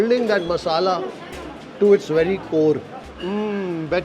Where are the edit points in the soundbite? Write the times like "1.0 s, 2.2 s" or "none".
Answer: 3.0 s